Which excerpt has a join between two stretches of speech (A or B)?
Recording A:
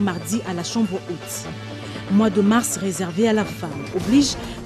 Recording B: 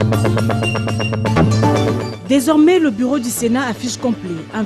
B